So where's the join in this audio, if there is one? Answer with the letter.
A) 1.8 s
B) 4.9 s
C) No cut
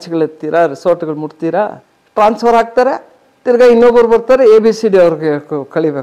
A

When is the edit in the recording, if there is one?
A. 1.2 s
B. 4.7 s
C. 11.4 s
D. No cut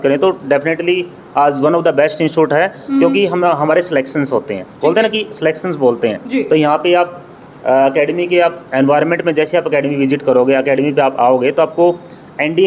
D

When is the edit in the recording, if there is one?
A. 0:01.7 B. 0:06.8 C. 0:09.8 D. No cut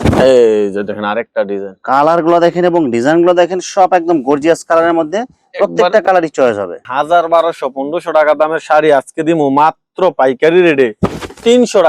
B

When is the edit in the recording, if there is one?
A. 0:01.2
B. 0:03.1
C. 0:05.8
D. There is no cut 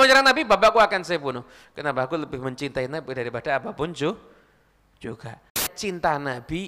C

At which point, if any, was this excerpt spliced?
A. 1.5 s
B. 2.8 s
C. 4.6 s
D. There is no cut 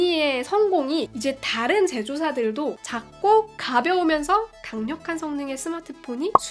B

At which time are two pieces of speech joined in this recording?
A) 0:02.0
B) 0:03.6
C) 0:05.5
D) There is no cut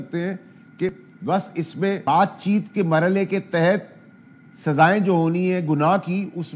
A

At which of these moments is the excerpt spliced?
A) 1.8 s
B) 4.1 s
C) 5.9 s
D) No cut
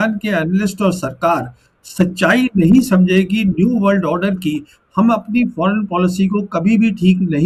D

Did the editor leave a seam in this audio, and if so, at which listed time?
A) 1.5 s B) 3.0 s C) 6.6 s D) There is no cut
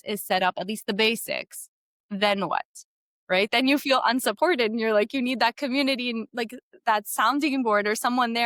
D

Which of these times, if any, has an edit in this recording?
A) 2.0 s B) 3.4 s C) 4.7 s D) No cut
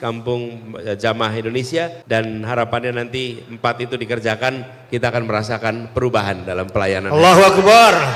A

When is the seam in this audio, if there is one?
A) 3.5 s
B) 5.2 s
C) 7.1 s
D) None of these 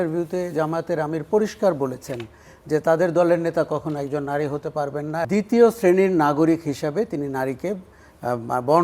B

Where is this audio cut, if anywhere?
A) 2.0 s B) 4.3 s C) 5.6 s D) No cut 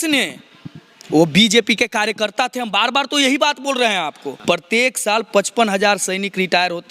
B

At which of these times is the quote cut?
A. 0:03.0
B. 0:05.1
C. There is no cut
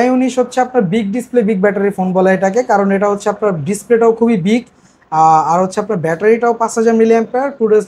C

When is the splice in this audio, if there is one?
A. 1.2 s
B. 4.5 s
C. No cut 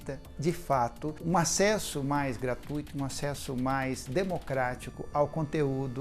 A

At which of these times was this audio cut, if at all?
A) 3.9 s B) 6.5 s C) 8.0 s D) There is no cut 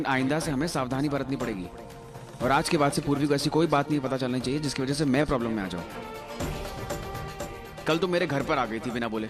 D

